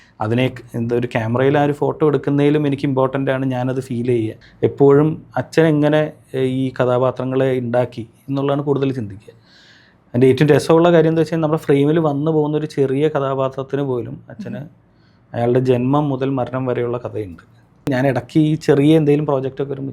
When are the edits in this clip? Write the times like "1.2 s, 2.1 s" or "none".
4.4 s, 17.9 s